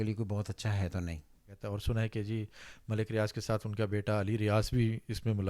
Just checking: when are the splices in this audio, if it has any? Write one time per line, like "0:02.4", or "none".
0:01.5